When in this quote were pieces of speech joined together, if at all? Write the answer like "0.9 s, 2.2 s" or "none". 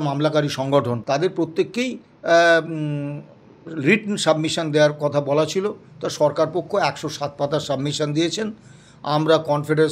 1.0 s